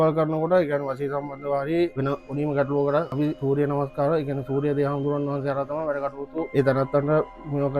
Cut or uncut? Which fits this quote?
cut